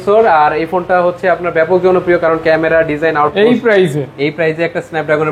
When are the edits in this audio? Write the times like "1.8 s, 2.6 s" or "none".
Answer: 3.3 s

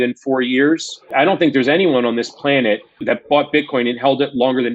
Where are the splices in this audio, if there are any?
1.1 s, 3.0 s

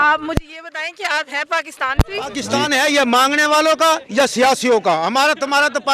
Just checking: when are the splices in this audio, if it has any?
2.5 s

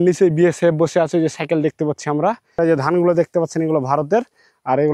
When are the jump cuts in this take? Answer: 2.6 s

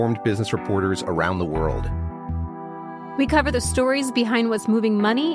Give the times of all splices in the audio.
none

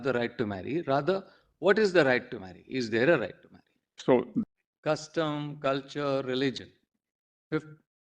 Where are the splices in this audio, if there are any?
4.6 s

